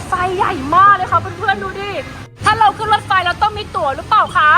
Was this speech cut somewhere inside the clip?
yes; 1 cut; at 2.2 s

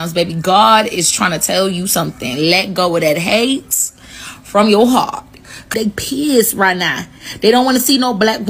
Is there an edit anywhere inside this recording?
yes; 1 cut; at 5.7 s

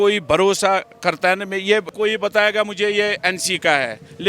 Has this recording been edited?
yes; 1 cut; at 1.9 s

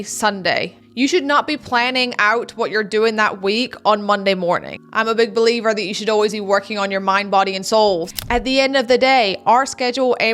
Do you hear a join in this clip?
yes; 2 cuts; at 4.7 s, 8.1 s

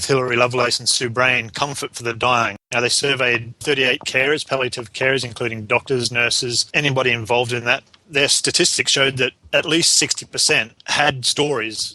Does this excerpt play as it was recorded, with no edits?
no; 6 cuts; at 2.6 s, 3.6 s, 6.7 s, 8.0 s, 9.4 s, 10.8 s

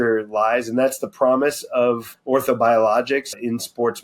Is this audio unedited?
no; 2 cuts; at 2.1 s, 3.3 s

